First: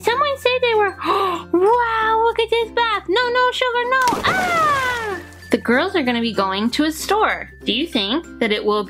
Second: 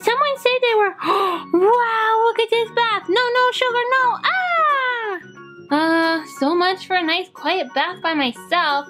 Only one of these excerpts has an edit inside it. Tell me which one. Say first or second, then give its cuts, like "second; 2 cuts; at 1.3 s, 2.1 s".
first; 2 cuts; at 5.3 s, 7.5 s